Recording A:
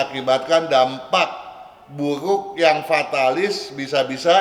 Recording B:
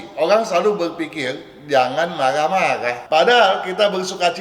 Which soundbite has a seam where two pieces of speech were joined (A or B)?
B